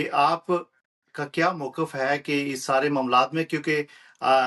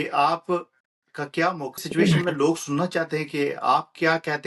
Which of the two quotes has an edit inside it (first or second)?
second